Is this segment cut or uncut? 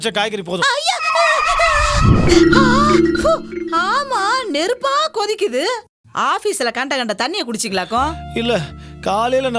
cut